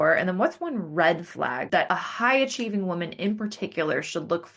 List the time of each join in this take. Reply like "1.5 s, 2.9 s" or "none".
1.8 s